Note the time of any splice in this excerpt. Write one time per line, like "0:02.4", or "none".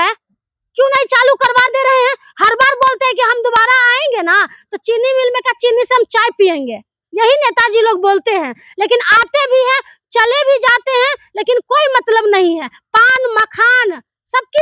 none